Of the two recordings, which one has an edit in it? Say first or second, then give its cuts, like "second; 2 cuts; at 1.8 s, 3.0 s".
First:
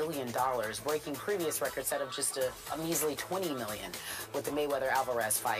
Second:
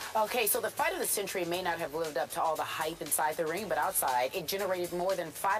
first; 1 cut; at 2.1 s